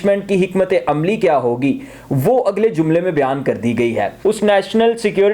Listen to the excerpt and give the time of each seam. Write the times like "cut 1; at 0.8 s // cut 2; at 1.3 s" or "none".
cut 1; at 4.1 s